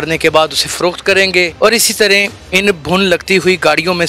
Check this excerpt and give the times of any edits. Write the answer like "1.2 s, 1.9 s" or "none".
1.5 s, 2.4 s